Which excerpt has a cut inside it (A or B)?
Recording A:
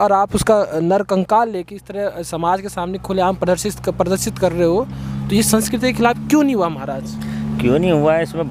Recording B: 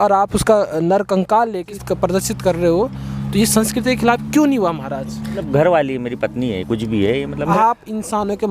B